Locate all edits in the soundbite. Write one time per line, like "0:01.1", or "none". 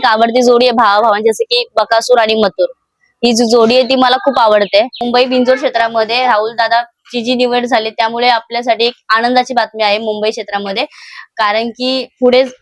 0:05.0

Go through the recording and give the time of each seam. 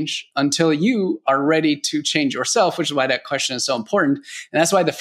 none

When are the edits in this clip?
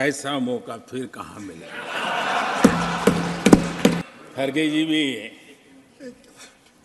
0:04.1

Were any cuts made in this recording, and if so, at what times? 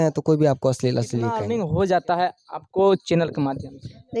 0:01.4

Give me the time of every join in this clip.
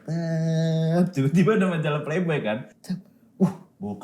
0:02.7

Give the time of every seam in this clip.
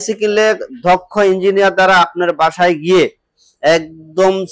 none

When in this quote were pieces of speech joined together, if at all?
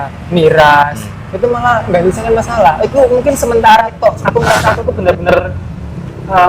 0:04.2

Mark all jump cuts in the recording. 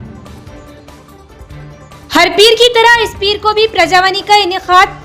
0:01.1

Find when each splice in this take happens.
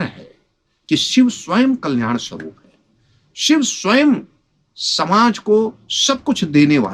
none

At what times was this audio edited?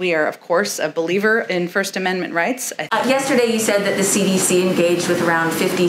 0:02.8

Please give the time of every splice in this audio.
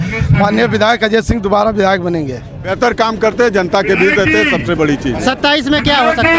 0:02.7

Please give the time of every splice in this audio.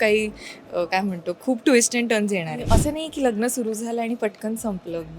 0:02.6

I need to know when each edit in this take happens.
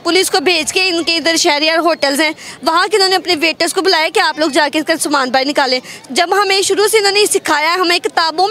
0:05.9

